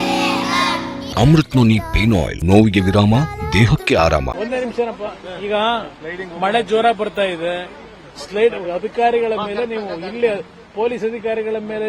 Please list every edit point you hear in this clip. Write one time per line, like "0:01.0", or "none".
0:01.0
0:02.3
0:04.3